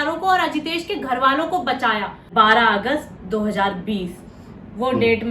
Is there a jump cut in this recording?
yes; 1 cut; at 2.3 s

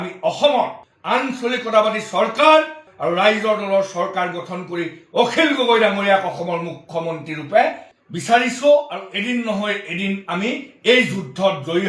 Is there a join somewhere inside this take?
no; 0 cuts

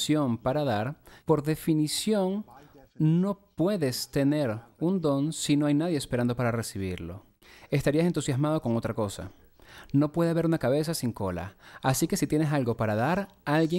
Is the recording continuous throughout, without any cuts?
no; 1 cut; at 1.1 s

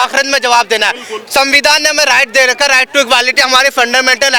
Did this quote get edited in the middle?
no; 0 cuts

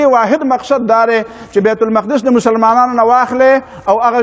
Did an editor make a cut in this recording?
no; 0 cuts

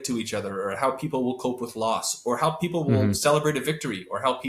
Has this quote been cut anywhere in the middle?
no; 0 cuts

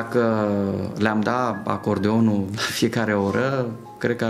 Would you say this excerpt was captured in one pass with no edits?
yes; 0 cuts

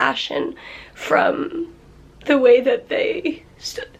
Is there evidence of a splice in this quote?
no; 0 cuts

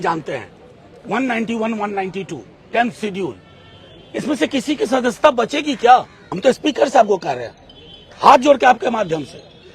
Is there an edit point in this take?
yes; 1 cut; at 6.2 s

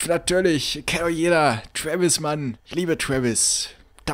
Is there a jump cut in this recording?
yes; 1 cut; at 2.6 s

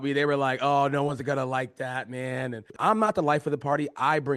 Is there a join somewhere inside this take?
yes; 1 cut; at 2.7 s

